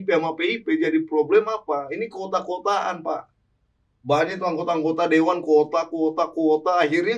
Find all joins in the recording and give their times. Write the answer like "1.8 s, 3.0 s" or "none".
none